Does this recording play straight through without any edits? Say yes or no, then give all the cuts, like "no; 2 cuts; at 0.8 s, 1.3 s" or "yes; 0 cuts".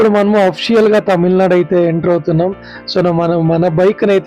yes; 0 cuts